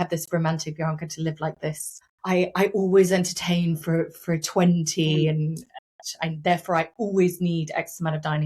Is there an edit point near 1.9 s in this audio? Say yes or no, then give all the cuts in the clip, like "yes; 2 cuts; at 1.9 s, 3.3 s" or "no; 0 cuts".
yes; 1 cut; at 1.9 s